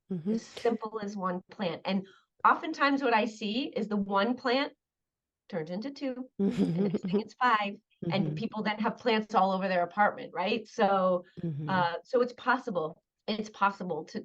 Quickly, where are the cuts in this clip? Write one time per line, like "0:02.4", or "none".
0:13.1